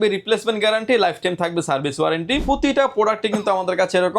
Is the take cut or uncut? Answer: cut